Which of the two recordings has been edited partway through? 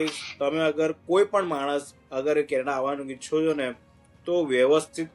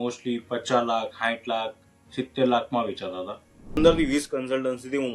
second; 1 cut; at 3.8 s

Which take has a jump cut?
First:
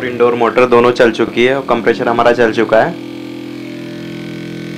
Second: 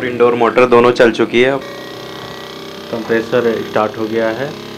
second; 1 cut; at 1.3 s

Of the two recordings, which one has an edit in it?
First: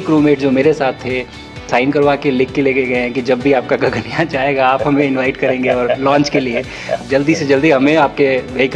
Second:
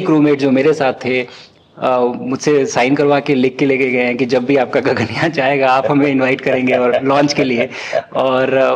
first; 2 cuts; at 1.7 s, 7.0 s

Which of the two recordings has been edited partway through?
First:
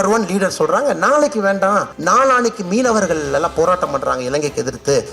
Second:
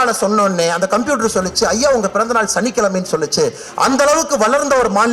first; 1 cut; at 1.9 s

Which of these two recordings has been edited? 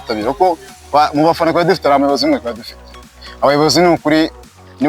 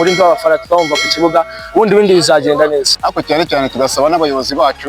second; 1 cut; at 3.0 s

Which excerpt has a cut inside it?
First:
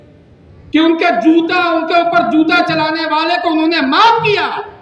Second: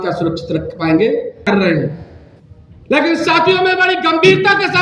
second; 1 cut; at 1.5 s

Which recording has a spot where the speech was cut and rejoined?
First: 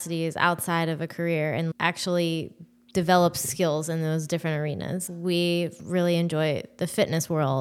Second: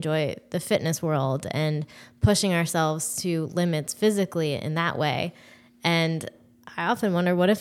first; 2 cuts; at 1.7 s, 5.0 s

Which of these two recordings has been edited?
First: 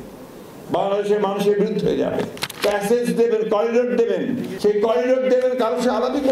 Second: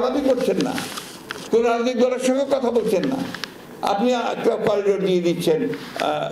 first; 2 cuts; at 2.4 s, 4.5 s

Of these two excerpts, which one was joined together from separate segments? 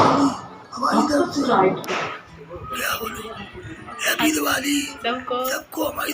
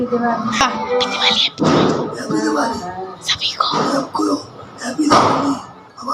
first; 1 cut; at 1.8 s

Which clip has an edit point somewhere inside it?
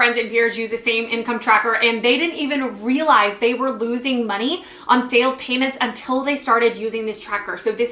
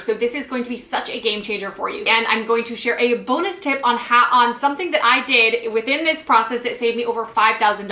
second; 1 cut; at 2.1 s

